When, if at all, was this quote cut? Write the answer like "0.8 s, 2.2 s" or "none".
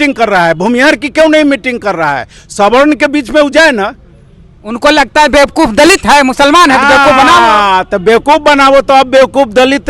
none

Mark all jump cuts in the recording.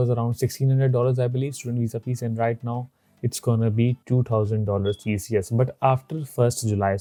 none

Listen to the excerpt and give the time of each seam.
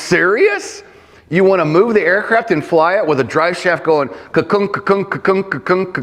none

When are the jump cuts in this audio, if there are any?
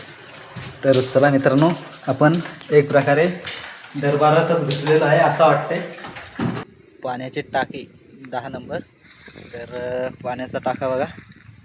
6.8 s

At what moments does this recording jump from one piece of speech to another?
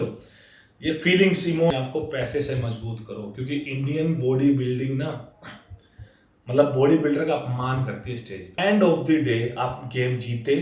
1.7 s, 8.5 s

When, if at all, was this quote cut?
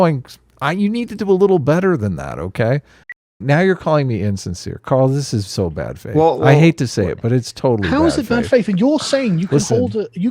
3.2 s

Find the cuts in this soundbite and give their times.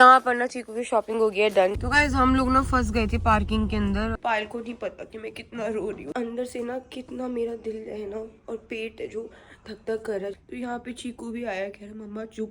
1.7 s, 4.2 s, 6.1 s, 10.3 s

